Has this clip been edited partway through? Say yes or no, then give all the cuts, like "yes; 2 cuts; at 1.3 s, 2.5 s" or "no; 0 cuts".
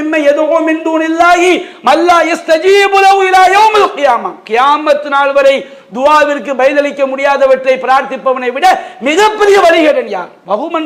no; 0 cuts